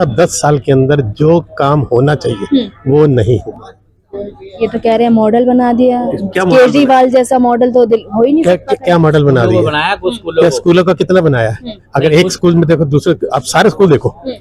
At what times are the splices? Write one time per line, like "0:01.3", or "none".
none